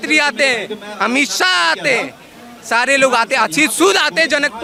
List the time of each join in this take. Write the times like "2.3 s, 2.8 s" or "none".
none